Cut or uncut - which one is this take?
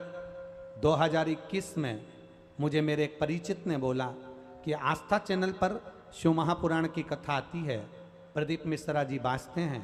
uncut